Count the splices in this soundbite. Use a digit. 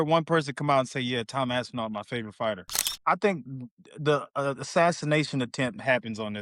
1